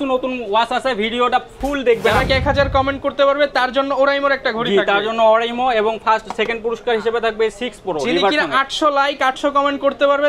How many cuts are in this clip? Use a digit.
1